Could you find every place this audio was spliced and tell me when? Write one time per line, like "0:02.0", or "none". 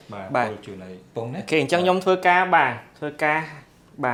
none